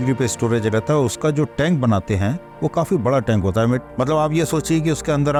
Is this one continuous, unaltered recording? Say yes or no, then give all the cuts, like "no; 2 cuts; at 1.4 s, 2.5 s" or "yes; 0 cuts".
yes; 0 cuts